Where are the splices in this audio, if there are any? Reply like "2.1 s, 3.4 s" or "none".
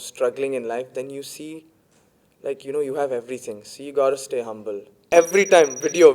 5.0 s

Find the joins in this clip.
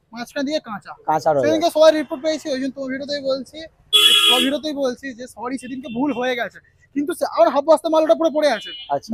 none

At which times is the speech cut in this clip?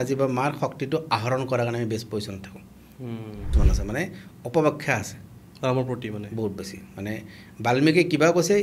3.5 s

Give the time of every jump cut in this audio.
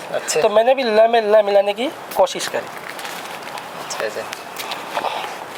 none

